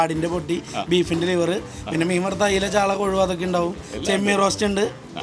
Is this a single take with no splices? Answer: yes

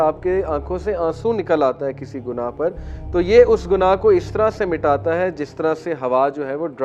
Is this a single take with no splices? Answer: yes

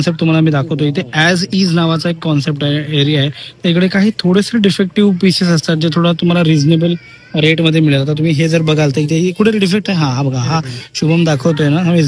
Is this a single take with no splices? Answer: yes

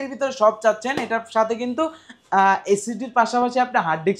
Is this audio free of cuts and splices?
yes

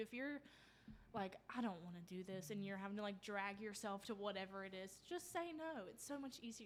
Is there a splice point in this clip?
no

